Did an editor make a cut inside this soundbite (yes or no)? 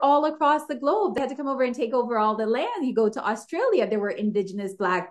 yes